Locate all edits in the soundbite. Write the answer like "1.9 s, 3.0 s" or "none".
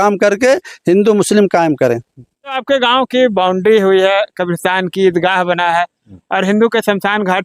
2.6 s